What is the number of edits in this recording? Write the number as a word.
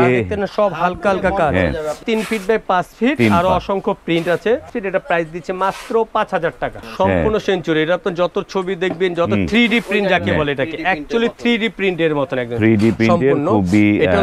three